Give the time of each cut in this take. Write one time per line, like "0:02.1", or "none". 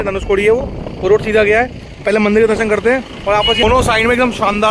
0:03.6